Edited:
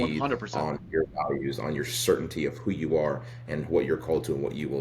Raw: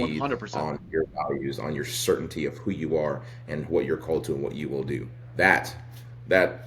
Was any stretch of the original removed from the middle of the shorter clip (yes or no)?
no